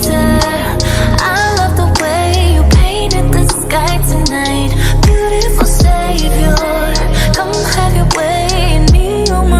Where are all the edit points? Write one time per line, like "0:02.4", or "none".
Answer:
none